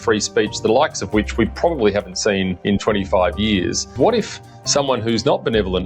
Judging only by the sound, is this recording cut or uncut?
cut